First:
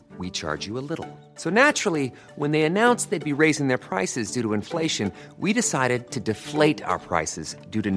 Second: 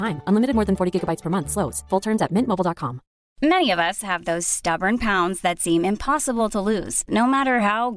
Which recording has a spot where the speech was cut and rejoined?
second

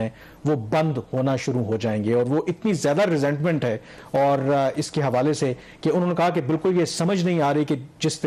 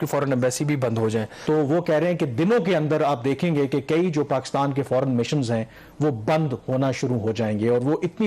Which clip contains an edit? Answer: second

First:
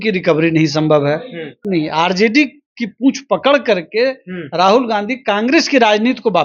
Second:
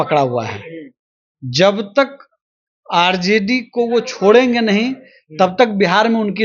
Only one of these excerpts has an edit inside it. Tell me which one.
first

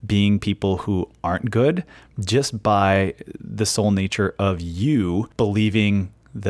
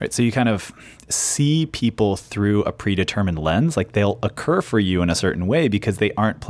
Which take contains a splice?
first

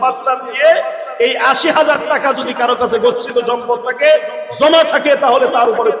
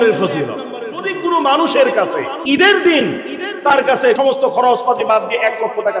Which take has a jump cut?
second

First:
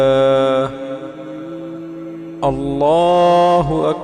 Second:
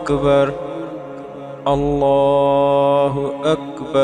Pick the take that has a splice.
first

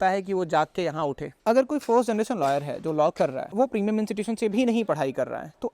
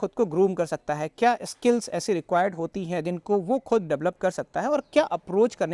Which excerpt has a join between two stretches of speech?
first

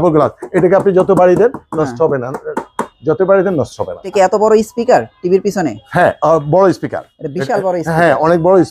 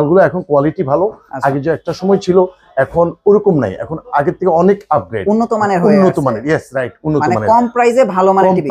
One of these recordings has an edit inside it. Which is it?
first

